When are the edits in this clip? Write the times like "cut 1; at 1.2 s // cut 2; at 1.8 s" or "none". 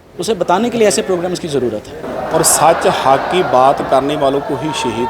cut 1; at 2.0 s